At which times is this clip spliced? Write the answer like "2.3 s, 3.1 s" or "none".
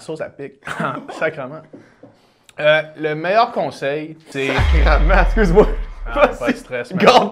4.2 s